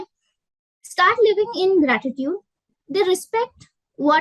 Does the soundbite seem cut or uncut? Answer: uncut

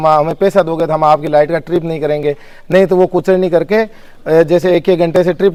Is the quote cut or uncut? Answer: uncut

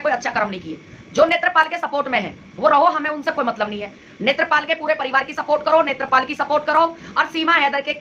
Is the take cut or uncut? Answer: uncut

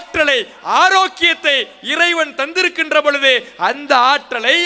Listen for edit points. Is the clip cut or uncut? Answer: uncut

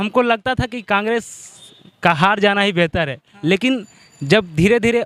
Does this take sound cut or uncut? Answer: uncut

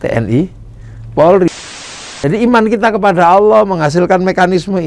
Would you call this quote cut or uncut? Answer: cut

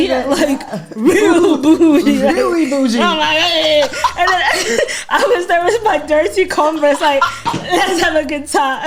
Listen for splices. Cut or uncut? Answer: uncut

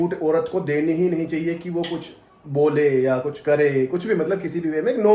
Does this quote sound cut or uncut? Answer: uncut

